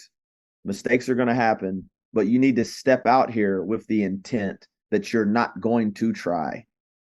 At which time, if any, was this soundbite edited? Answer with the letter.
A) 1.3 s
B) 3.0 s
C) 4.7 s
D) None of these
D